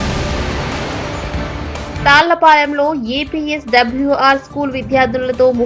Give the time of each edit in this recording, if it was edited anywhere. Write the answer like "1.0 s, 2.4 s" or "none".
2.0 s